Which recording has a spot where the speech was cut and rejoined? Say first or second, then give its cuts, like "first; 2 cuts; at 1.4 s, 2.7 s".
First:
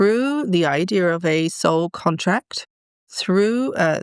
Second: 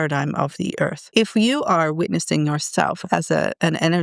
second; 1 cut; at 1.0 s